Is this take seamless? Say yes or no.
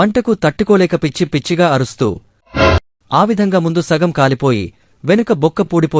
no